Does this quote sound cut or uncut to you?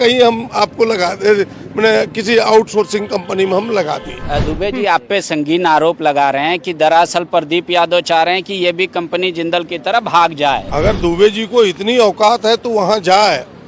cut